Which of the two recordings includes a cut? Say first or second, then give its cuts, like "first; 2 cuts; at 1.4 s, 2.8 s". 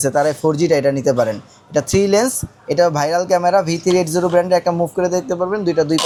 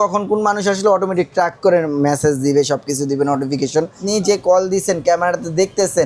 second; 1 cut; at 4.0 s